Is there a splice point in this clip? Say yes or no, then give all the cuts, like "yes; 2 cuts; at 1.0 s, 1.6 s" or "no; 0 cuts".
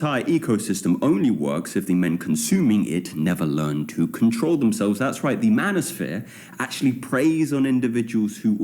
yes; 1 cut; at 1.0 s